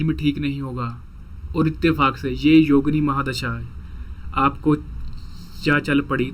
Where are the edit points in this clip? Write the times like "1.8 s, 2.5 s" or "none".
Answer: none

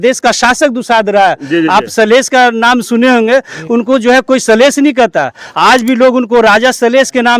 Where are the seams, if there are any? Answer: none

